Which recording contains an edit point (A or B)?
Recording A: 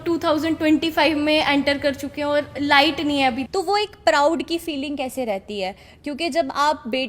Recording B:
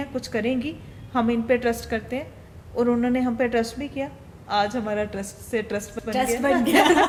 A